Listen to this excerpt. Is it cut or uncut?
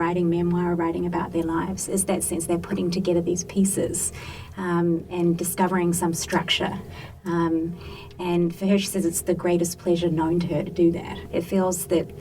cut